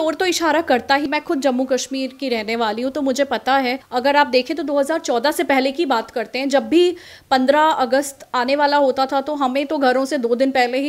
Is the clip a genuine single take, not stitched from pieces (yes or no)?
no